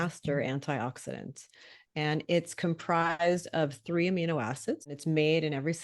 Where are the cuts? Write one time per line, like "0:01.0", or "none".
0:04.9